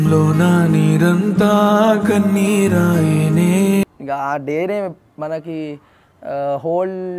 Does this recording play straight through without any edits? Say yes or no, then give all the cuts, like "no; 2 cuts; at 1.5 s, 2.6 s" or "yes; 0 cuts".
no; 1 cut; at 3.9 s